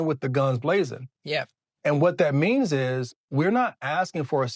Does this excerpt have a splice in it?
yes; 1 cut; at 1.7 s

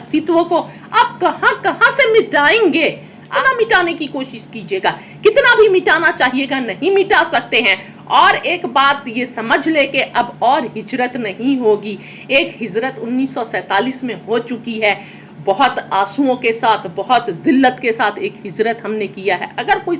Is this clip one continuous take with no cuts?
no; 1 cut; at 3.4 s

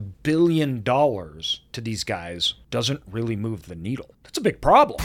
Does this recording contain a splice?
yes; 2 cuts; at 2.5 s, 4.2 s

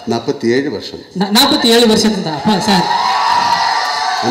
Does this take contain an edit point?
no; 0 cuts

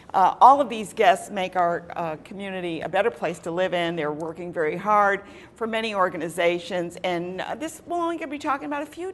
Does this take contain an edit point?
yes; 1 cut; at 2.8 s

